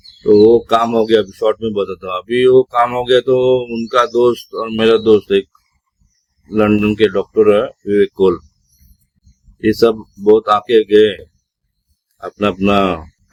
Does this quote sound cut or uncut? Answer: uncut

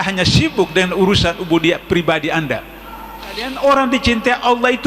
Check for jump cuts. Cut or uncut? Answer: cut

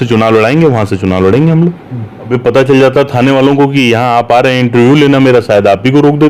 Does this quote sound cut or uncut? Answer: cut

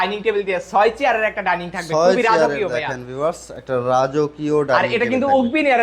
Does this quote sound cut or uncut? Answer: uncut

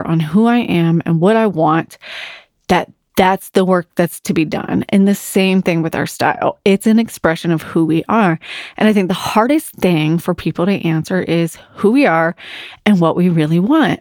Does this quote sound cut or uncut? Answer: uncut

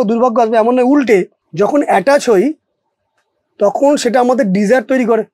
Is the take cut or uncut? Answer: cut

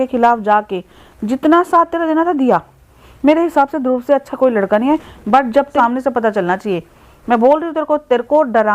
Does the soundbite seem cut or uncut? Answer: cut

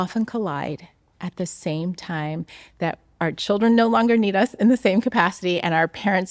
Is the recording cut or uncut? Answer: uncut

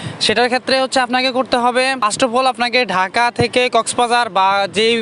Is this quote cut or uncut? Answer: cut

